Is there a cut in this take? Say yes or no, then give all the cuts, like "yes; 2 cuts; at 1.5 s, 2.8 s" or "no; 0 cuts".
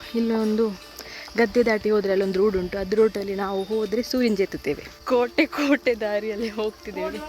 yes; 1 cut; at 5.4 s